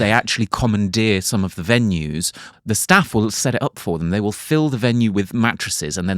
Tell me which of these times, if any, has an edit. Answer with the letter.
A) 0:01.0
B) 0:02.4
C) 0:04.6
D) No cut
B